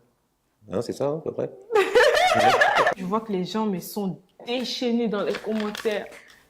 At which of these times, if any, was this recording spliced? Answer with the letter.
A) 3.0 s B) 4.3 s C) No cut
A